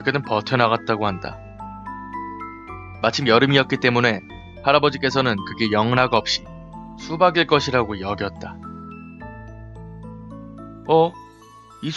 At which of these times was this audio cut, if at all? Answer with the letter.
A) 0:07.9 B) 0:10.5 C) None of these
A